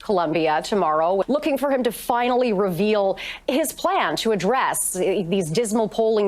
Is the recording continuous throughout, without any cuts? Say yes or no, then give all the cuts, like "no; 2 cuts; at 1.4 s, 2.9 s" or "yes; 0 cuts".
no; 1 cut; at 1.2 s